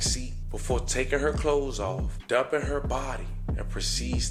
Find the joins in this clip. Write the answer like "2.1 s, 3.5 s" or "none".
none